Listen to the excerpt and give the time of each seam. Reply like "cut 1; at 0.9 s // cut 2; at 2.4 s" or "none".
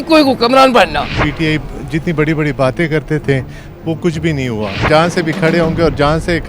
cut 1; at 1.3 s // cut 2; at 4.8 s